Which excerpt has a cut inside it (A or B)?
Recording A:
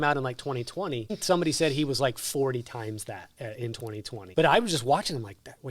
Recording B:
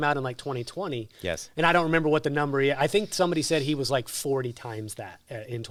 A